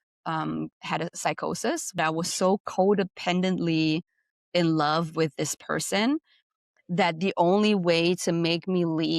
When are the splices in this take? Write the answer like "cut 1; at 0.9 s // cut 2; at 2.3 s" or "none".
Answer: cut 1; at 2.0 s